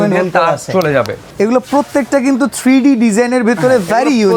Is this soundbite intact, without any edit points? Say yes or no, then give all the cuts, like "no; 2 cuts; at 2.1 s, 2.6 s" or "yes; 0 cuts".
no; 1 cut; at 1.2 s